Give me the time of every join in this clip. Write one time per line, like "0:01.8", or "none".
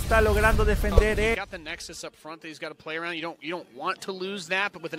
0:01.3